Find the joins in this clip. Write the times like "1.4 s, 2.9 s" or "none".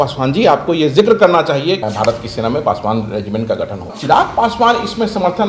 1.9 s, 4.0 s